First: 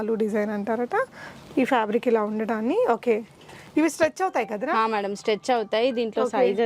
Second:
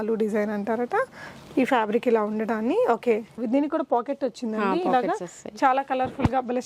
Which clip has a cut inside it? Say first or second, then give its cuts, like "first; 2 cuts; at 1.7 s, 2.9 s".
second; 1 cut; at 3.4 s